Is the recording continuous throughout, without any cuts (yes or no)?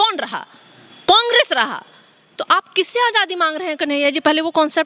yes